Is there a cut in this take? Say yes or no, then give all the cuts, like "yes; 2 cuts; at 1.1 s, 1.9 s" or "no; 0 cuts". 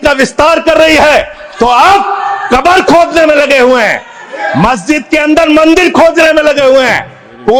no; 0 cuts